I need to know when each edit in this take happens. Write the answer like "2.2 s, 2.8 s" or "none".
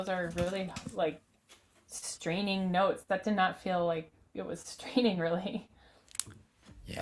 none